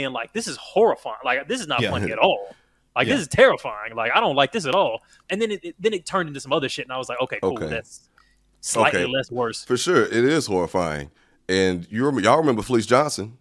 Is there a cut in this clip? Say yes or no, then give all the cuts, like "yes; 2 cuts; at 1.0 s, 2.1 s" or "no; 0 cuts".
no; 0 cuts